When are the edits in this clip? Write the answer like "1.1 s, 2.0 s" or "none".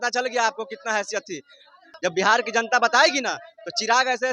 1.8 s